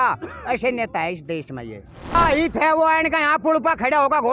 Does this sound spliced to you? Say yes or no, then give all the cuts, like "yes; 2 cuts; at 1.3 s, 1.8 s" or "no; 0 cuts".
yes; 1 cut; at 2.2 s